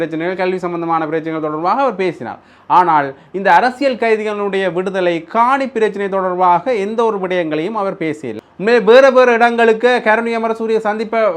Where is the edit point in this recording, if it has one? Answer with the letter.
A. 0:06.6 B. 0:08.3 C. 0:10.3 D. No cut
B